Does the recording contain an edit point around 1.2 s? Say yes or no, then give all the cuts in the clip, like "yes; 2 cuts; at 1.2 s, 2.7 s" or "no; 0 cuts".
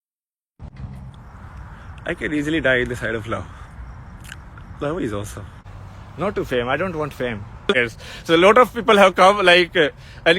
yes; 3 cuts; at 1.2 s, 5.6 s, 7.8 s